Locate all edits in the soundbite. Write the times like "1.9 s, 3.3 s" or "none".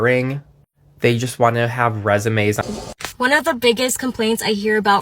2.6 s